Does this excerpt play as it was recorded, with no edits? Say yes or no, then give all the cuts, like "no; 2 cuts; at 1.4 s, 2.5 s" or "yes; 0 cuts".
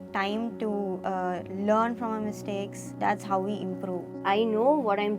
no; 3 cuts; at 1.0 s, 2.8 s, 4.2 s